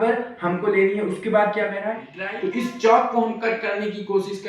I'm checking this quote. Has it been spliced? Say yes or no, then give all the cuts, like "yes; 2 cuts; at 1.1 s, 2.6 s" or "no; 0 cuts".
yes; 1 cut; at 2.1 s